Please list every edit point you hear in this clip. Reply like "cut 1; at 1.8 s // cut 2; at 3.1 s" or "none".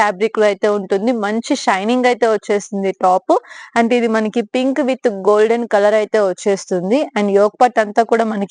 none